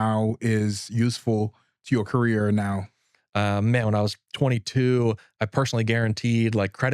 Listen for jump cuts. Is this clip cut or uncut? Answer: cut